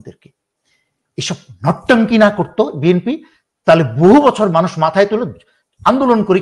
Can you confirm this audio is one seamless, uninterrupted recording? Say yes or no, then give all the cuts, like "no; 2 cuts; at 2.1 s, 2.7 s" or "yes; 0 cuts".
yes; 0 cuts